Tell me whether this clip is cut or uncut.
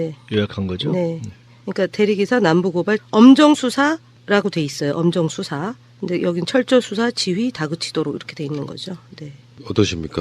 cut